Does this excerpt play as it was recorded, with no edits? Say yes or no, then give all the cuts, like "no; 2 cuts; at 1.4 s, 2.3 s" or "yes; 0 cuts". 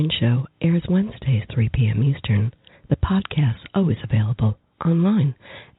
yes; 0 cuts